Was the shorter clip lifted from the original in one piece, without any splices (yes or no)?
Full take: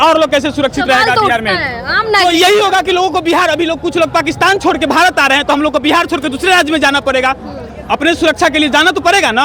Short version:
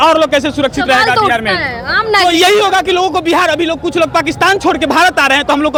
yes